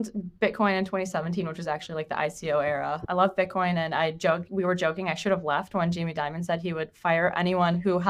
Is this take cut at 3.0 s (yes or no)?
yes